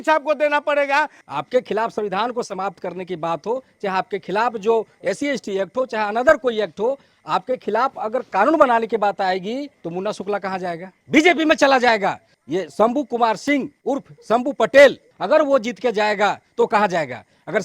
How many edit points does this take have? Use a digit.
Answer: 6